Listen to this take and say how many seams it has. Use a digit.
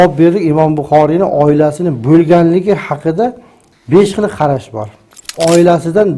1